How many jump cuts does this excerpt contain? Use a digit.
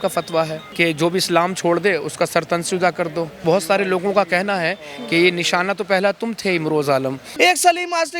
2